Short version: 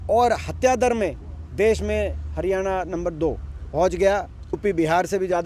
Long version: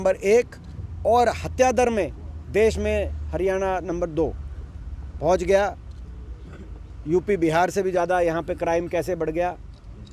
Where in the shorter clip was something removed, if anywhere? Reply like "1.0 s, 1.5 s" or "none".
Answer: 3.5 s, 4.6 s

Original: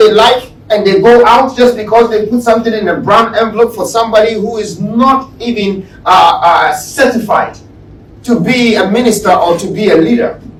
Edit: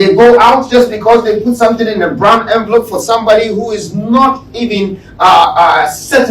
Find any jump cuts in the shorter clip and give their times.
none

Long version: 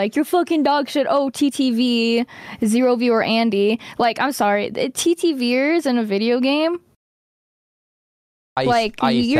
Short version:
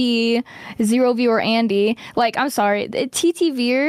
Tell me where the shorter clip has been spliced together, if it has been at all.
none

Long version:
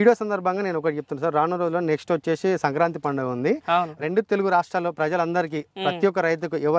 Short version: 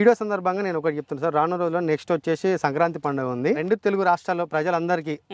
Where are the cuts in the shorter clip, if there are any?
3.6 s

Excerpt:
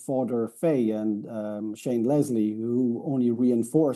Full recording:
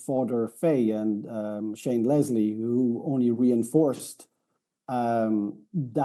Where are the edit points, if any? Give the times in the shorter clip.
none

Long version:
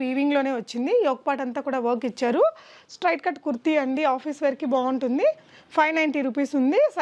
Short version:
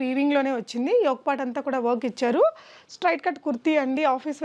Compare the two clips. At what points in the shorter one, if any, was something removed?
none

